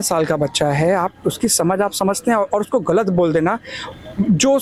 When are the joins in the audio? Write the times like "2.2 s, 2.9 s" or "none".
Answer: none